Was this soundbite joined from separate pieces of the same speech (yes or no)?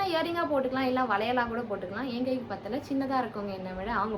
no